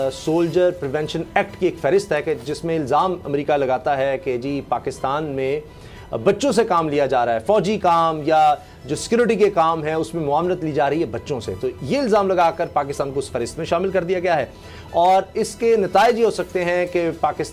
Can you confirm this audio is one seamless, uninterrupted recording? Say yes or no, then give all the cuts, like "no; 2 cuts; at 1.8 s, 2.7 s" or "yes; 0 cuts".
yes; 0 cuts